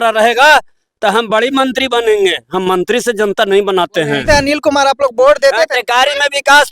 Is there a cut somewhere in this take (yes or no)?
yes